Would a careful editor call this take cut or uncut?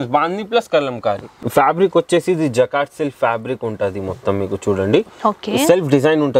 cut